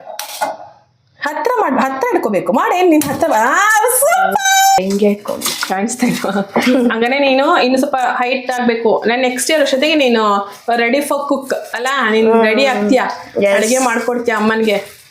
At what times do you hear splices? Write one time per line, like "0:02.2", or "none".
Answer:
0:04.8